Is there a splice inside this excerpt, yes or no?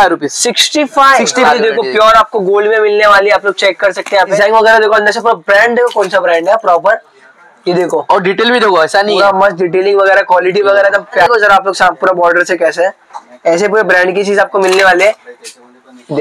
yes